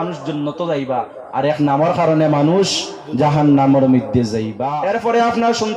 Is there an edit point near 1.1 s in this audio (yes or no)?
no